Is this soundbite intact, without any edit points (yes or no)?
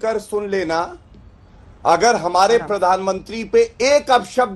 yes